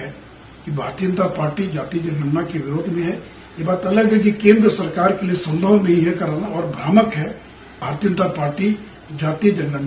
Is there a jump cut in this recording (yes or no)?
yes